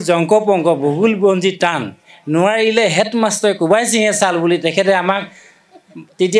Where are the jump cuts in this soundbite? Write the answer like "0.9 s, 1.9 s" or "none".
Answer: none